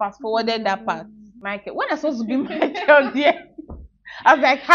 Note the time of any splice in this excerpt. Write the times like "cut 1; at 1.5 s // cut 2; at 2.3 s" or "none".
cut 1; at 1.4 s